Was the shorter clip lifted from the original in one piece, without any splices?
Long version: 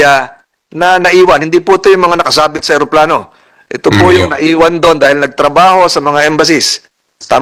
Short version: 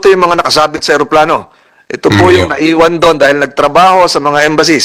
yes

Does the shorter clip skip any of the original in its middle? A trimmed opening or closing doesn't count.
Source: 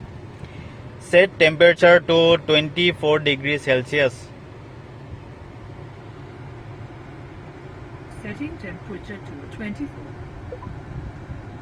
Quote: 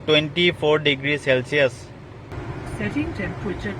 yes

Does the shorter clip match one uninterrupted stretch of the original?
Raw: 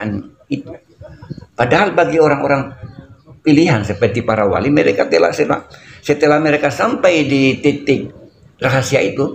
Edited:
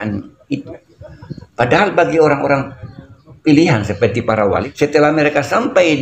no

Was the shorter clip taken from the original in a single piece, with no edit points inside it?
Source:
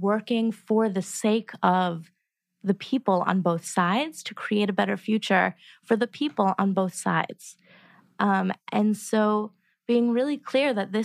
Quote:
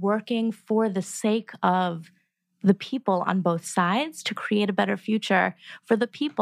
yes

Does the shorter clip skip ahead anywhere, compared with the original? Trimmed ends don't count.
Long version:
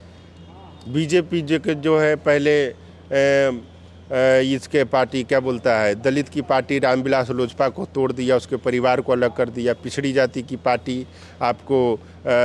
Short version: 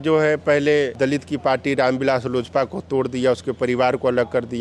yes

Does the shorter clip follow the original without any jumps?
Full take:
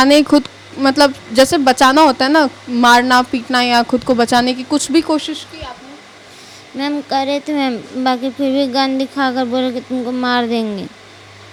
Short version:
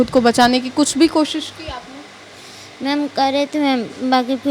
yes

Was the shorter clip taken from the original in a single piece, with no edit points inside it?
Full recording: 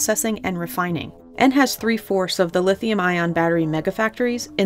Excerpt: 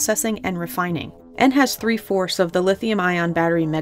yes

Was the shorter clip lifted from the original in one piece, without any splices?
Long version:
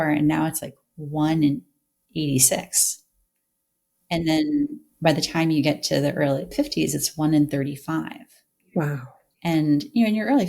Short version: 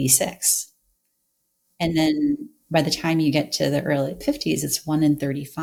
yes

